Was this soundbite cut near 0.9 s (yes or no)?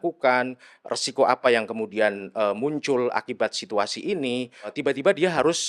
no